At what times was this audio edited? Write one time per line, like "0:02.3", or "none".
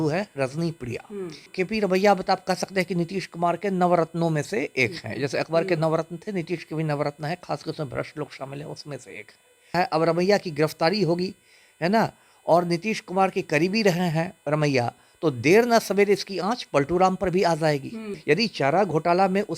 0:01.5
0:09.8
0:18.1